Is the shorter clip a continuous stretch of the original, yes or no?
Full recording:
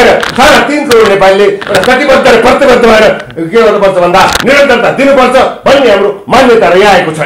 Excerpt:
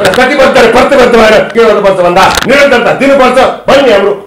no